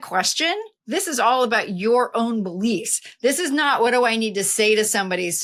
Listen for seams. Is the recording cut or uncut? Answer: uncut